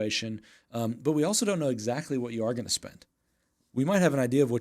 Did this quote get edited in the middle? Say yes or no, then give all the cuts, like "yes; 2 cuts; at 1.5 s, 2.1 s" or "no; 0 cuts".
no; 0 cuts